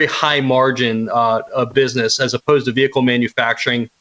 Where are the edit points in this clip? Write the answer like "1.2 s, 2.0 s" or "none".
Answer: none